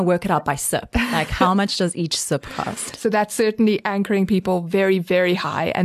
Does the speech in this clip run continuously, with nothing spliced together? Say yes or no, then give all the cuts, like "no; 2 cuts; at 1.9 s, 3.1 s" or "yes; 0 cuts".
yes; 0 cuts